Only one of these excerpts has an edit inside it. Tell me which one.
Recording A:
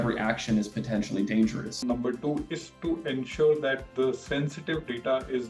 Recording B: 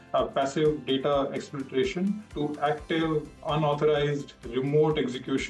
A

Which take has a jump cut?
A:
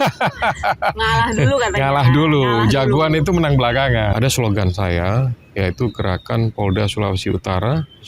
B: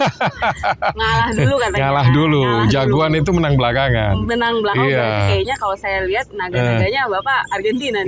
A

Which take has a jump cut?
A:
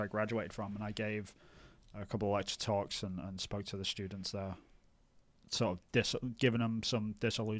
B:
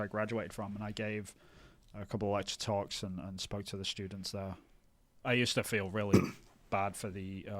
B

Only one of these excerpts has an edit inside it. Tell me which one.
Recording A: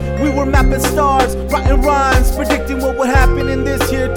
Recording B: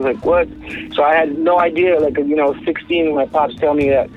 B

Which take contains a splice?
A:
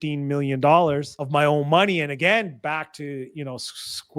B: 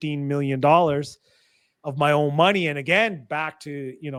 A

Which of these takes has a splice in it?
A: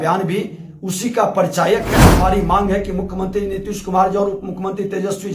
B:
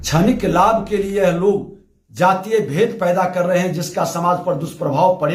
A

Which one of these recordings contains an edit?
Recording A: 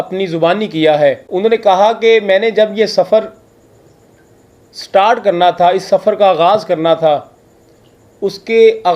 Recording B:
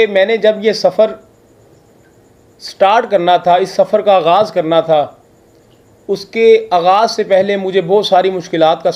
A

